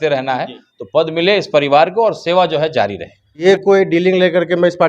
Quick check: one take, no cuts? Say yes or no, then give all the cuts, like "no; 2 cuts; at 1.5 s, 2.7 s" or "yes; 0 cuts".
no; 1 cut; at 3.3 s